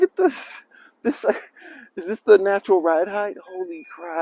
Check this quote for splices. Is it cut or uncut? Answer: uncut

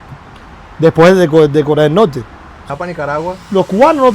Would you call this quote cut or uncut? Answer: cut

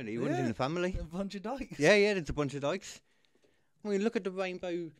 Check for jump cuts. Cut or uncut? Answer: uncut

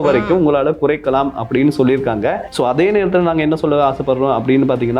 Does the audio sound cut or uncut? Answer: cut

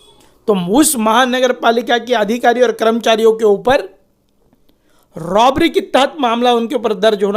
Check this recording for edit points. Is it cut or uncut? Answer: uncut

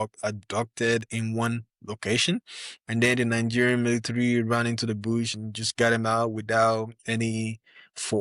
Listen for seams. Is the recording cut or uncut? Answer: uncut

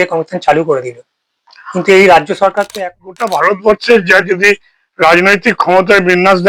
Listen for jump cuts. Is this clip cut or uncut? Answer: cut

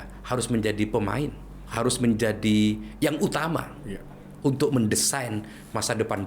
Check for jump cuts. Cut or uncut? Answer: cut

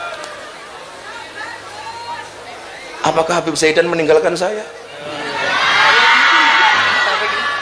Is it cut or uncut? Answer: uncut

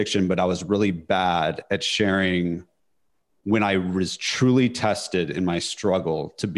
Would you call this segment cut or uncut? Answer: uncut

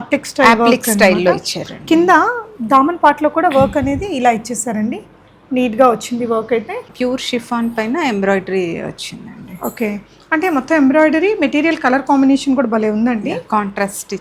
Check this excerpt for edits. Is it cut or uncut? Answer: cut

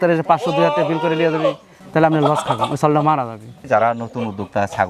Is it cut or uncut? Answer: cut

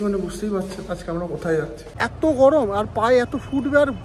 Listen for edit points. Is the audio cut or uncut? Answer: cut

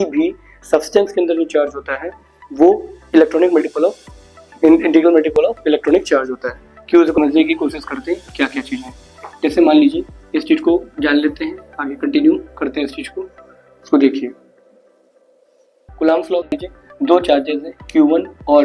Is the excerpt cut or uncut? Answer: cut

